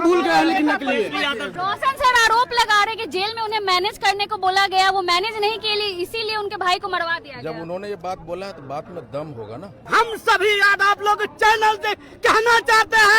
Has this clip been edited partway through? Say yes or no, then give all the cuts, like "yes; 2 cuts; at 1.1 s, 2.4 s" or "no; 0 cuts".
yes; 2 cuts; at 1.5 s, 9.8 s